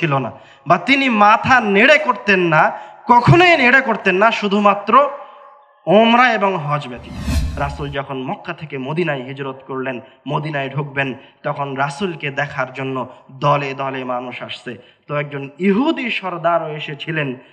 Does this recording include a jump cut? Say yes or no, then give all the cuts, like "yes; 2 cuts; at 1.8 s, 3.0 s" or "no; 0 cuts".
yes; 1 cut; at 7.4 s